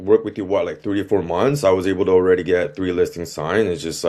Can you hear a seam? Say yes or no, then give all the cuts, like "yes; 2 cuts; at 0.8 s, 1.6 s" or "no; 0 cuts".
no; 0 cuts